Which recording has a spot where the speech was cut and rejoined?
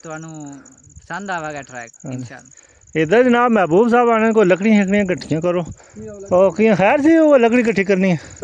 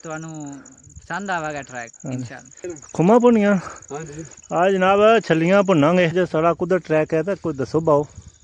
second; 2 cuts; at 2.8 s, 6.1 s

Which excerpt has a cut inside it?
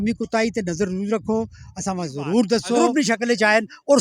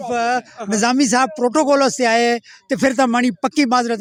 first; 1 cut; at 2.9 s

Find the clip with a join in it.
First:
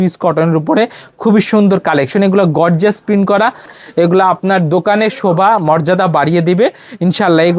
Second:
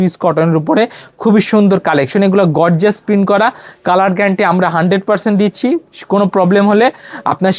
first; 1 cut; at 3.8 s

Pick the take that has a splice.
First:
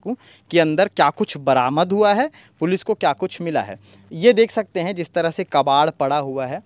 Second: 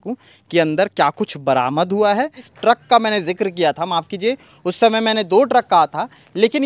second; 1 cut; at 2.4 s

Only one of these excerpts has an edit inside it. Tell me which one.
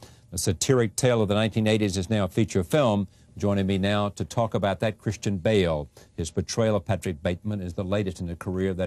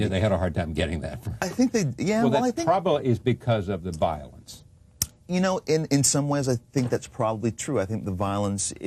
second; 1 cut; at 1.8 s

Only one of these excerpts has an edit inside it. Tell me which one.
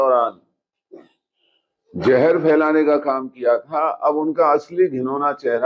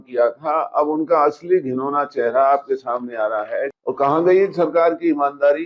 second; 1 cut; at 3.7 s

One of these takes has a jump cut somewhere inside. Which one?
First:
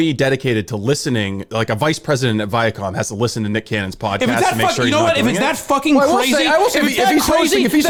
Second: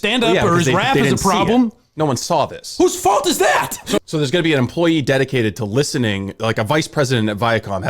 second; 1 cut; at 4.0 s

